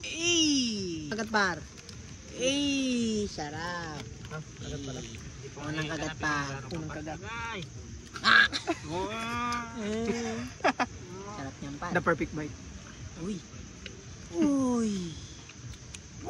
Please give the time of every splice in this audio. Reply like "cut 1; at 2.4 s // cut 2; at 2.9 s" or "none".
cut 1; at 1.1 s